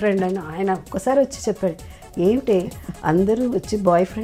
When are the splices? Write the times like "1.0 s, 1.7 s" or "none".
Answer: none